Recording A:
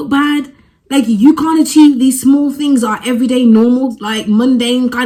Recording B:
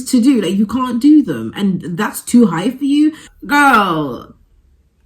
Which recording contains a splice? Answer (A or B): B